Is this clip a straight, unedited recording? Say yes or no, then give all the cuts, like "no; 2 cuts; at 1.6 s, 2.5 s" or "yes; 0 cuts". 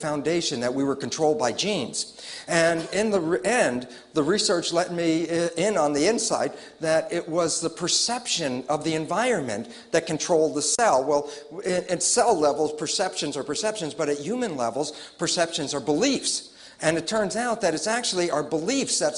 yes; 0 cuts